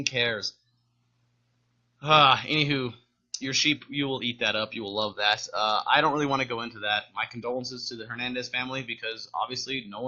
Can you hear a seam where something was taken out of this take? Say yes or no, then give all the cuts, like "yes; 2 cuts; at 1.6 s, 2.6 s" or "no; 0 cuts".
yes; 1 cut; at 5.5 s